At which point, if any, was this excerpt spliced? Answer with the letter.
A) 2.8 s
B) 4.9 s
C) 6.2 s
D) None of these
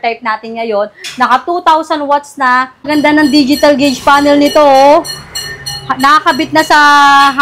A